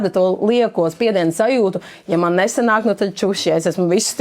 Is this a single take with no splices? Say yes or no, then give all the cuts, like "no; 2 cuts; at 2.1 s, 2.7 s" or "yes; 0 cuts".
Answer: yes; 0 cuts